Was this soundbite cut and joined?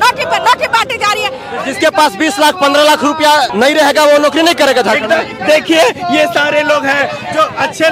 yes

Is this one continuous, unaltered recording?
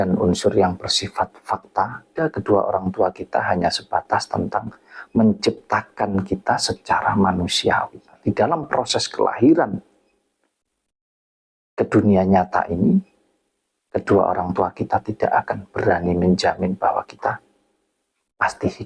no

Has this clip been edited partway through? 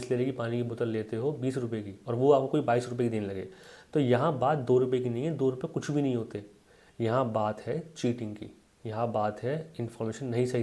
no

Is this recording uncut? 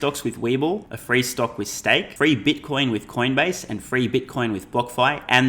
no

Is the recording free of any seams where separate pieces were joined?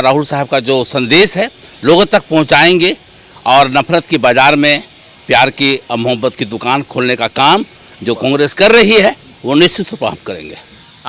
yes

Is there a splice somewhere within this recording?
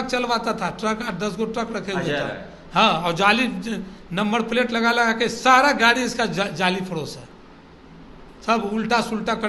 no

